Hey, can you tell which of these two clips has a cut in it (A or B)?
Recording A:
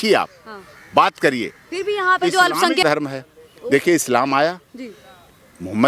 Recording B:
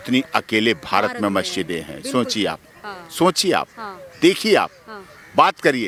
A